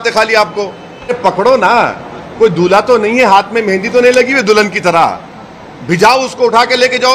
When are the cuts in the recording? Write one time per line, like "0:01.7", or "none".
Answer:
0:01.2